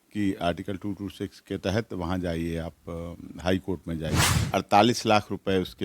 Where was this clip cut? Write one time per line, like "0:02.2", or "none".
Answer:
0:04.4